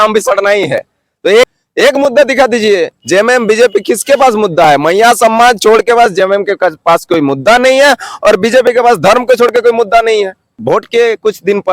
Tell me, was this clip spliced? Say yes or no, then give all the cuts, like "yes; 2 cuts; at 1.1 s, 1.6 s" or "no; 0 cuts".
yes; 2 cuts; at 1.5 s, 10.5 s